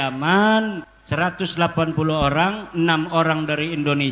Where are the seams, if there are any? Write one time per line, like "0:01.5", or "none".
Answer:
0:00.9

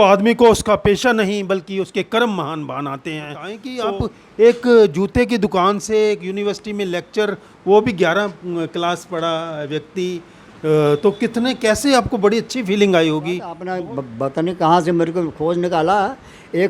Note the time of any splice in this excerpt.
0:03.7
0:13.6

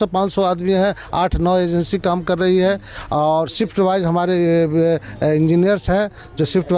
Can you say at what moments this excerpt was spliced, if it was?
none

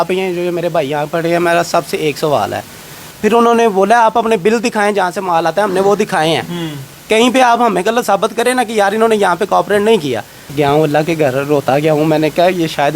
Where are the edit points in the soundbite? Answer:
0:03.1
0:10.5

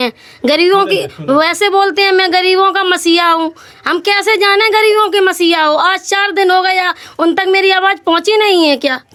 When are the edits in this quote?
none

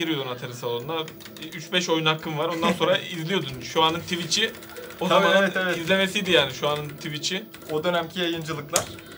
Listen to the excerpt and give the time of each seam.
none

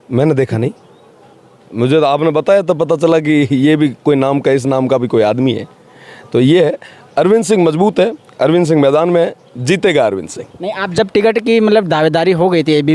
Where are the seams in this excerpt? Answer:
none

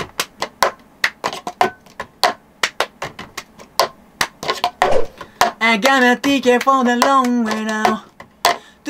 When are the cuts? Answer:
none

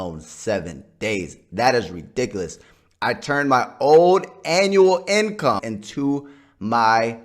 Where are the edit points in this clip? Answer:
0:05.7

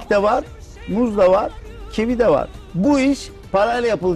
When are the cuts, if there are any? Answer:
0:02.6

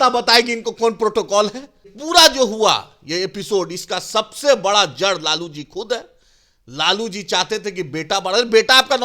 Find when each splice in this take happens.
0:01.9

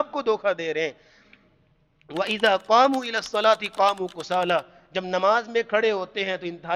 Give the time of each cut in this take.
none

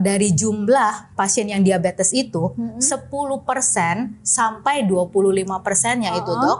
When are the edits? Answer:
none

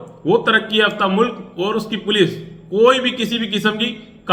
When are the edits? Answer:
none

